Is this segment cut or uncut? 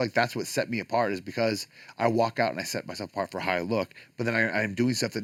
uncut